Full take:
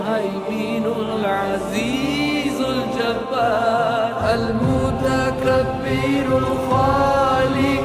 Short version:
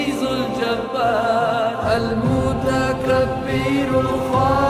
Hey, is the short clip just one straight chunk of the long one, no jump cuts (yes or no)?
yes